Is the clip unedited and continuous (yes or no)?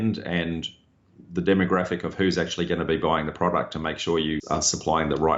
no